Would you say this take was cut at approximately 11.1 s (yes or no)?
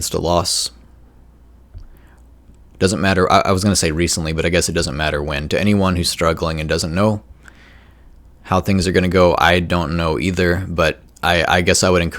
yes